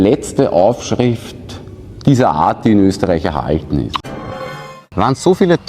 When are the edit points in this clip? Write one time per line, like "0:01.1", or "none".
0:04.5